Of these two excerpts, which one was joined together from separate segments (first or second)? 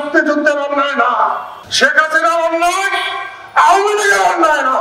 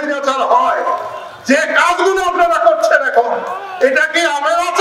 first